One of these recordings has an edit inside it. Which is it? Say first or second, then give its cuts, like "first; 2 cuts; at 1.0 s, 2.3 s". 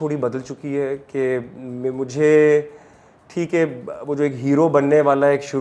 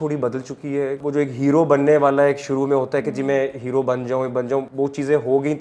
second; 2 cuts; at 1.0 s, 4.7 s